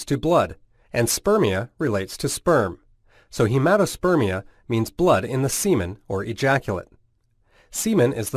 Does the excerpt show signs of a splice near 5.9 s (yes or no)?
no